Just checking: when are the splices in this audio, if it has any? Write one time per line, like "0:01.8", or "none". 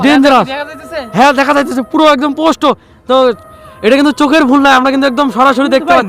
0:03.4